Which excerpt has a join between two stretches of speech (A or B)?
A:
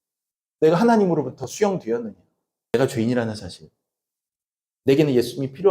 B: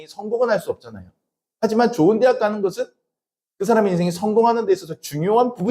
A